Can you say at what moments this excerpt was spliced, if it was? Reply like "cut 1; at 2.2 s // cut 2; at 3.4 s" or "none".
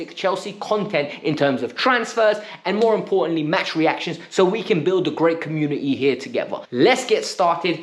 cut 1; at 6.6 s